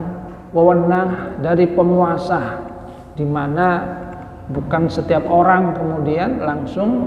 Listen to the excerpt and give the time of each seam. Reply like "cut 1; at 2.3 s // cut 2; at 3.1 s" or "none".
cut 1; at 1.1 s